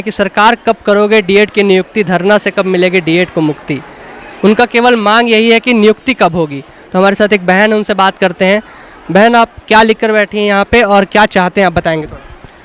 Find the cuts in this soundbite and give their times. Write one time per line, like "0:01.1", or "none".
none